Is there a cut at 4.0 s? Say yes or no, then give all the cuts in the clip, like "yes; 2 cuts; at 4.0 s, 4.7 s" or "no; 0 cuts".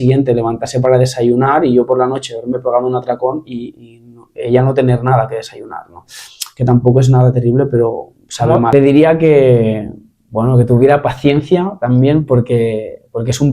no; 1 cut; at 8.7 s